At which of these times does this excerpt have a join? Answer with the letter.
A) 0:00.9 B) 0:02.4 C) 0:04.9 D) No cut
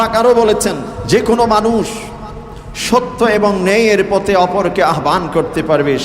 A